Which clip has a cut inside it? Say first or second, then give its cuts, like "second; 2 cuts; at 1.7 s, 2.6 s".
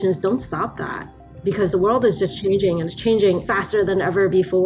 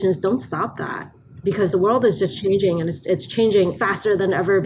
first; 1 cut; at 2.9 s